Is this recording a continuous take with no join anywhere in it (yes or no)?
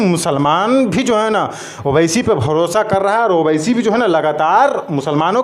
yes